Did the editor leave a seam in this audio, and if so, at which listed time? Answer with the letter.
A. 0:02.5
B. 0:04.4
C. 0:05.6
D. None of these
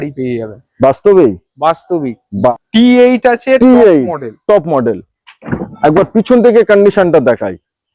A